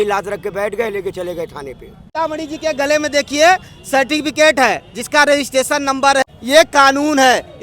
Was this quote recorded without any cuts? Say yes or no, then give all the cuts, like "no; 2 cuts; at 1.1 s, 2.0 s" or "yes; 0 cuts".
no; 2 cuts; at 2.1 s, 6.2 s